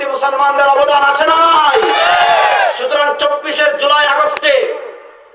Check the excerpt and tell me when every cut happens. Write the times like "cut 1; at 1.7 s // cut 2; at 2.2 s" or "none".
none